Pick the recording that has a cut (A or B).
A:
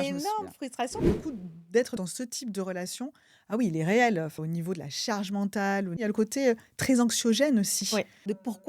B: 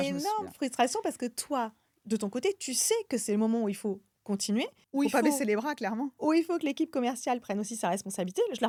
A